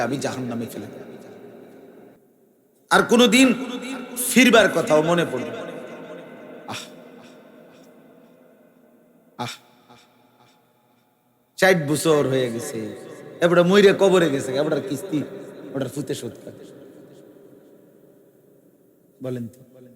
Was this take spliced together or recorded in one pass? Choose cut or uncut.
cut